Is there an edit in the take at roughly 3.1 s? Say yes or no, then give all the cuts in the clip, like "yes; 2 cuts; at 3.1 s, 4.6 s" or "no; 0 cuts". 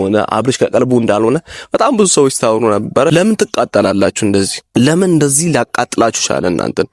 yes; 2 cuts; at 3.1 s, 4.6 s